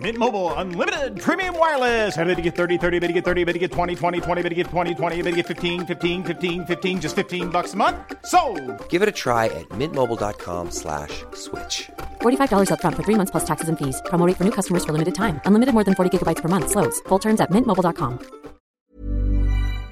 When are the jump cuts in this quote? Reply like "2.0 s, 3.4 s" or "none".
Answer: 18.8 s

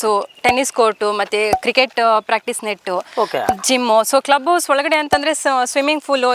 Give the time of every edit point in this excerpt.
none

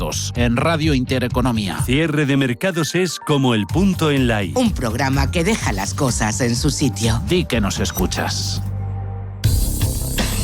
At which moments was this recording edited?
9.2 s

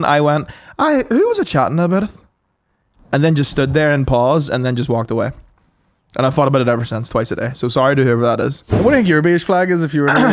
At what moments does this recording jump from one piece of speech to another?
8.8 s

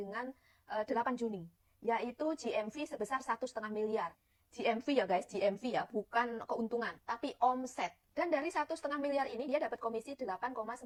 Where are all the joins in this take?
none

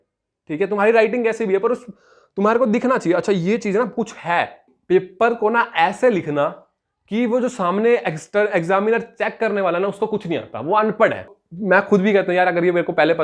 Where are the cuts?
4.7 s, 11.3 s

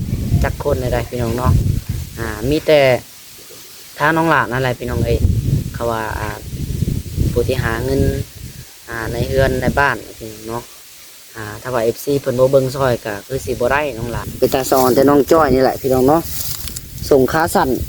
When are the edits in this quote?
14.2 s

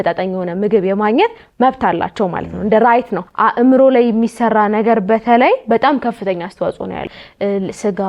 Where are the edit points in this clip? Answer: 3.2 s, 7.0 s

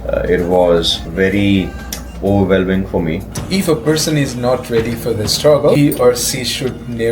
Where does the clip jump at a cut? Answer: 1.0 s, 3.4 s, 5.8 s

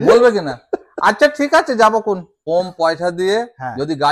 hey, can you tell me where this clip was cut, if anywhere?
2.3 s

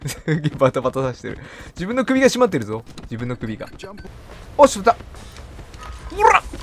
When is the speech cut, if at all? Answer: 4.0 s

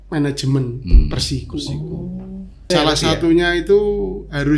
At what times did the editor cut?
2.7 s

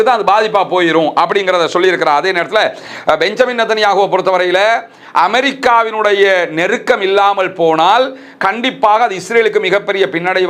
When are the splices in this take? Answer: 2.8 s

